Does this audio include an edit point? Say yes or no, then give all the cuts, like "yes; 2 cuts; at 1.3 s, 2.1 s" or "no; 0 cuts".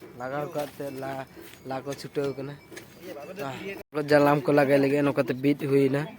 yes; 1 cut; at 3.8 s